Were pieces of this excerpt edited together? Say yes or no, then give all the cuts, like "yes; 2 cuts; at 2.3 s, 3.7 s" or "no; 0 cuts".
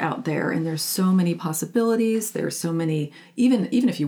no; 0 cuts